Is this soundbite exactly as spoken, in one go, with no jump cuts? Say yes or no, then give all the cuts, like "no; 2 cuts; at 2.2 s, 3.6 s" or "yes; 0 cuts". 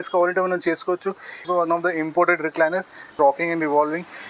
no; 2 cuts; at 1.5 s, 3.1 s